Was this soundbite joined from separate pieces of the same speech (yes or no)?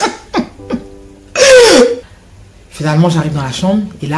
yes